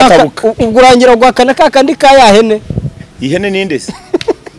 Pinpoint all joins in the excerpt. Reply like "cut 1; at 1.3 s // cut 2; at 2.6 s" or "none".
none